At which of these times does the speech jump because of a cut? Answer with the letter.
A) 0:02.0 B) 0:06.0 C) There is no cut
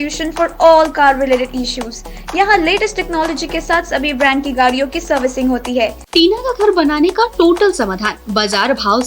B